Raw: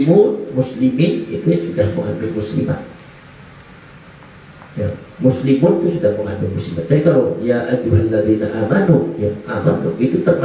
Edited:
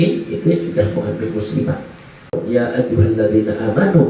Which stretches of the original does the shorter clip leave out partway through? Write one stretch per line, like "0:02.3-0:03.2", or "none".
0:03.4-0:07.3